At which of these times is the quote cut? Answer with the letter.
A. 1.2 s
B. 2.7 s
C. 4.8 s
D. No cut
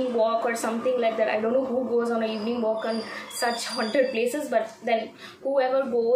D